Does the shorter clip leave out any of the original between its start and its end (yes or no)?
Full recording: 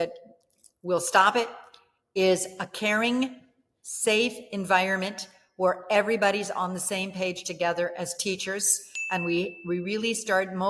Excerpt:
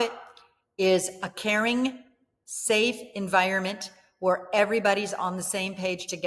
no